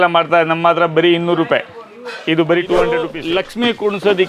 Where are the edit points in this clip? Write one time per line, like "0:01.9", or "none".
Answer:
0:03.1